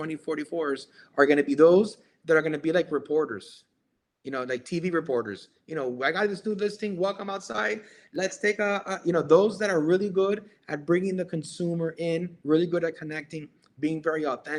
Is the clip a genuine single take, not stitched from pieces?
yes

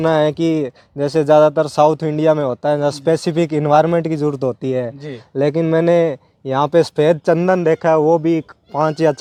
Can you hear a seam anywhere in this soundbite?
no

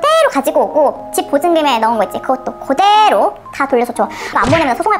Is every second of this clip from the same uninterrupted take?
yes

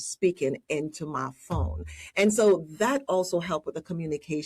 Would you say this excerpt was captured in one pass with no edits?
yes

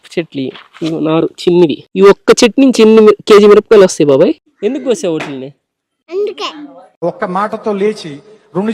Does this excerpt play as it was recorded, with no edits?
no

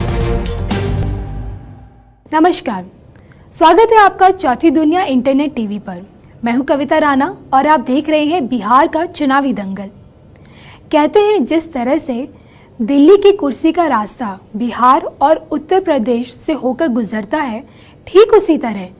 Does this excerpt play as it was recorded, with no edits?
no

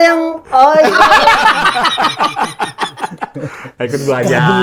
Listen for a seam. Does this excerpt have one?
no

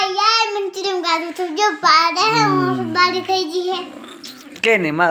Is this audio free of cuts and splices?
yes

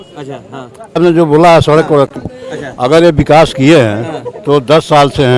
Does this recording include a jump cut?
yes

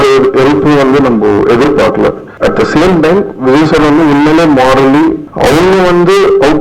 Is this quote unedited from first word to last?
no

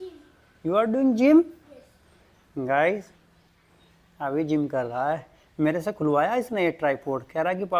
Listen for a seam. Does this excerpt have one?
no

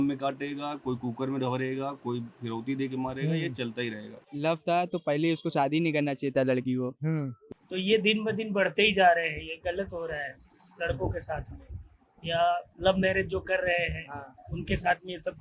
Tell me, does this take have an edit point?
yes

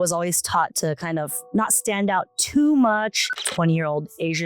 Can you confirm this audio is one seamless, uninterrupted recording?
no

